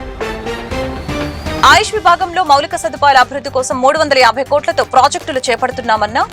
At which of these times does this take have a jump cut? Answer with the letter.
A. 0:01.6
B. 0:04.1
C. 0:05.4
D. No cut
A